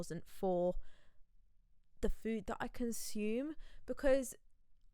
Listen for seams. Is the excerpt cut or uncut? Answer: uncut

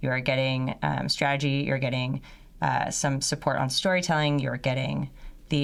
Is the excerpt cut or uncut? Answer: uncut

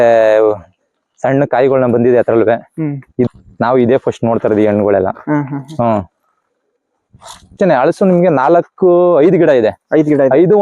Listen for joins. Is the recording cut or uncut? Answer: cut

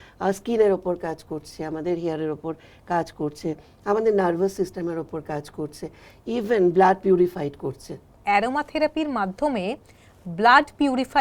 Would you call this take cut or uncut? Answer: cut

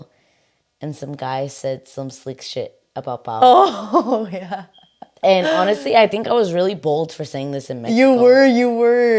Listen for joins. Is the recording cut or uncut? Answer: uncut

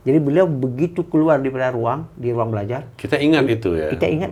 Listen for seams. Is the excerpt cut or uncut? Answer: uncut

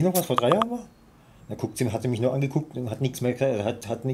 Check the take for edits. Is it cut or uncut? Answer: uncut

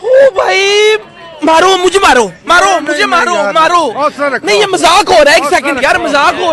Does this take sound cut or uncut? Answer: uncut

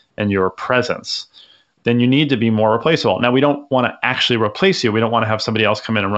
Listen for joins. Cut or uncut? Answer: uncut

